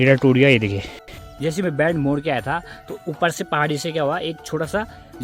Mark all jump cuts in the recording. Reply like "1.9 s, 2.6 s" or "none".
1.3 s